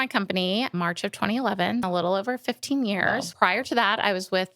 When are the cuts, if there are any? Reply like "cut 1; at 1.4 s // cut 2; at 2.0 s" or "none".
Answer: cut 1; at 1.9 s // cut 2; at 3.3 s